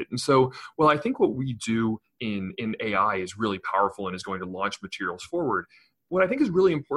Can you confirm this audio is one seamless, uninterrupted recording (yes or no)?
yes